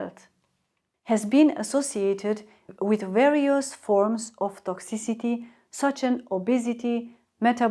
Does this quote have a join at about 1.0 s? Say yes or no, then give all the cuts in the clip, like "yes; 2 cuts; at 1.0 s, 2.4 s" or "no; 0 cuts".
yes; 1 cut; at 1.0 s